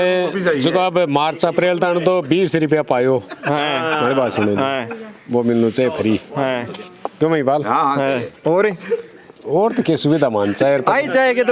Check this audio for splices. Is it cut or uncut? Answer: uncut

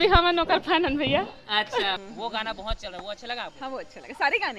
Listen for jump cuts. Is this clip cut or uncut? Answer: cut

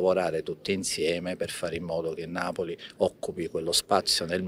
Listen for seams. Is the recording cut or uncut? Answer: uncut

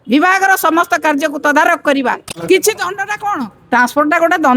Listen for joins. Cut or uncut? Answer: cut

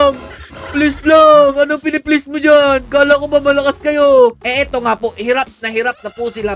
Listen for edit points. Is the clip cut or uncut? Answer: cut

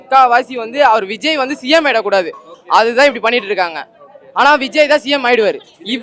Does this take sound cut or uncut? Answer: uncut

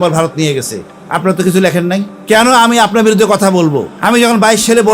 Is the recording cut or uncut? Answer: cut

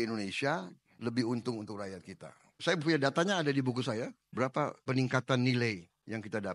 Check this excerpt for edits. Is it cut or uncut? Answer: uncut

